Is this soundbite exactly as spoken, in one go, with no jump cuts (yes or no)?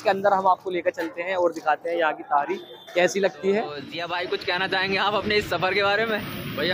no